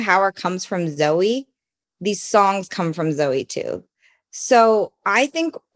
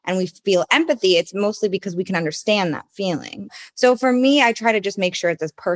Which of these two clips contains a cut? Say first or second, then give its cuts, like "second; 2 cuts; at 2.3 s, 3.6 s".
second; 1 cut; at 3.5 s